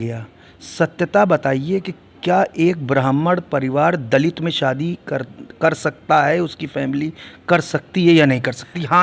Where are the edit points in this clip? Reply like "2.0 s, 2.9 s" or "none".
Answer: none